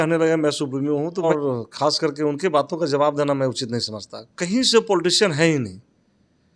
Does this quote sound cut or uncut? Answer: cut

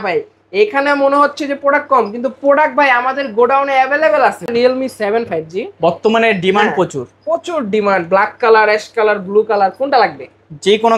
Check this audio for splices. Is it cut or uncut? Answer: cut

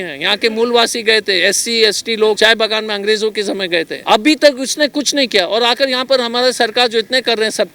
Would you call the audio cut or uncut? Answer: cut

